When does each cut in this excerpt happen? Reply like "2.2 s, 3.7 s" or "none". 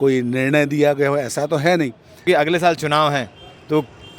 2.2 s